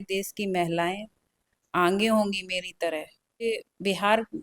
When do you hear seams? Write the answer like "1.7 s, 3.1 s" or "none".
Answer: 3.4 s